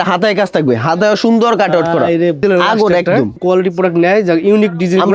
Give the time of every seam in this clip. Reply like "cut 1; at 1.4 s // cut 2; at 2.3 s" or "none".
cut 1; at 2.4 s // cut 2; at 3.4 s